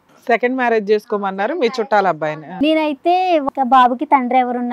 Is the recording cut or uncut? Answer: cut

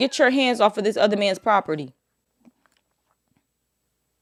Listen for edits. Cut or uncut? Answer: uncut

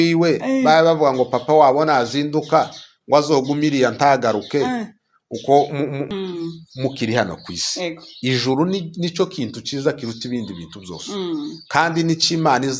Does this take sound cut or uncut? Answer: cut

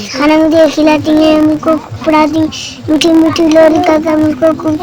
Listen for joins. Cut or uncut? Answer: uncut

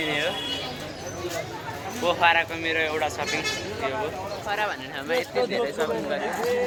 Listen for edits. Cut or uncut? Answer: uncut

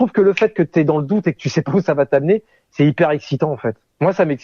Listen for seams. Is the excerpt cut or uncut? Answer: uncut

